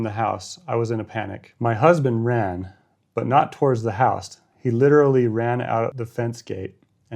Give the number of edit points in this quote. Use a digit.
2